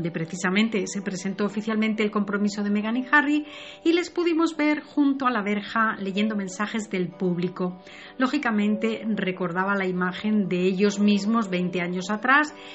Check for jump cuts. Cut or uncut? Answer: cut